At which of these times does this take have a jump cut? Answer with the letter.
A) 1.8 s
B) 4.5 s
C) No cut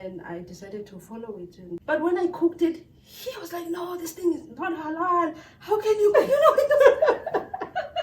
A